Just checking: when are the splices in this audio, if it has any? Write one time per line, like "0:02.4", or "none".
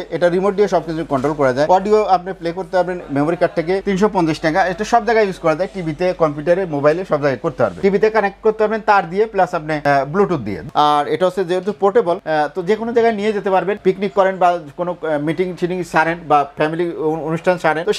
0:03.8
0:07.8
0:10.6

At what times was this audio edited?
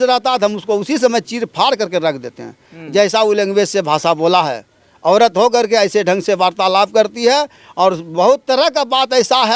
none

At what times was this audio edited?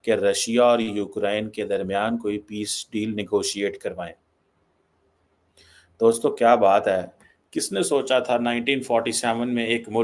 none

